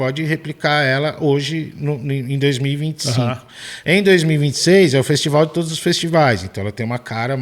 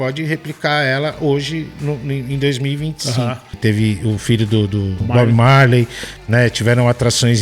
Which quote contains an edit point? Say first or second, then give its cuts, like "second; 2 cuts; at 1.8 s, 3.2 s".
second; 2 cuts; at 3.6 s, 5.0 s